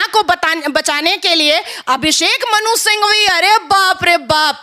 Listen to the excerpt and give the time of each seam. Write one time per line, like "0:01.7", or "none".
none